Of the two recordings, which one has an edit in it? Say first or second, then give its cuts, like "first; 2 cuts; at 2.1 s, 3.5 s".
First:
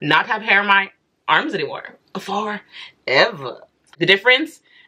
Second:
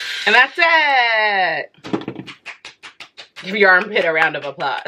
first; 1 cut; at 3.9 s